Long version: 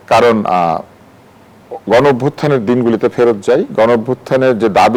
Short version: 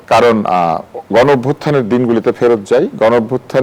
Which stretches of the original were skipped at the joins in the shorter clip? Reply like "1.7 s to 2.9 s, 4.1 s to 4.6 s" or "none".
0.9 s to 1.7 s